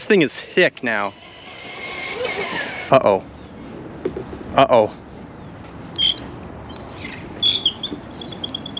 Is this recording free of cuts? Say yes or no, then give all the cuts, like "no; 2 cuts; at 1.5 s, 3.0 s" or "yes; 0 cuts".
no; 1 cut; at 2.8 s